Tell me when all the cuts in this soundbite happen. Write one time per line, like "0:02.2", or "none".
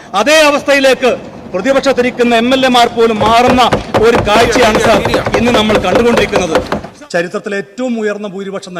0:06.8